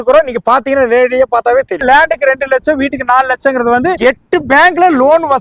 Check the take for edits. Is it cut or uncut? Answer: uncut